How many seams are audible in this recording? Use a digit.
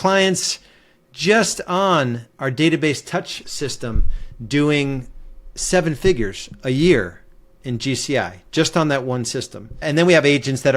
2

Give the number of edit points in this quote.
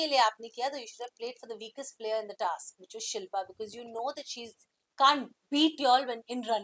0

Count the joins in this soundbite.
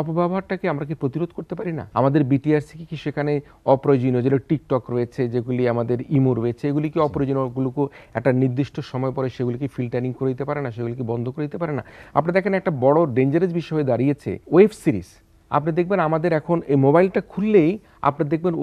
3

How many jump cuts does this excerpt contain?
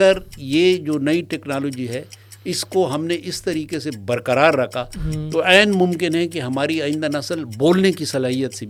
0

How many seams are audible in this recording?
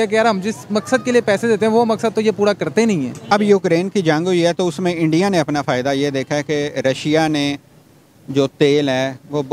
1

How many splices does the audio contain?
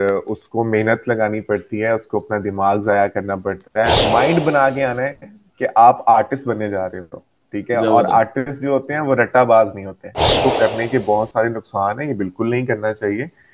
2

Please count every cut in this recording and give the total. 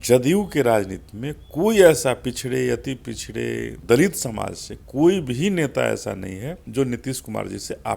2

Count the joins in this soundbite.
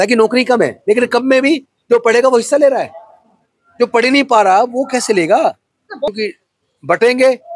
1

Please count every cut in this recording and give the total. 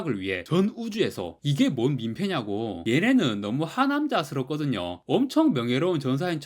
1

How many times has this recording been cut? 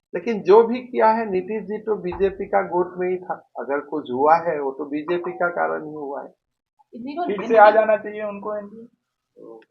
0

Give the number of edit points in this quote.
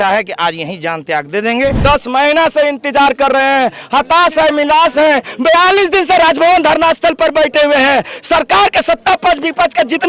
1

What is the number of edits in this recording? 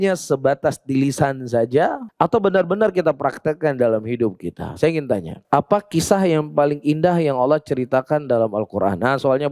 2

